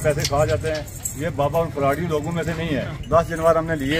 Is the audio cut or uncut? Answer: cut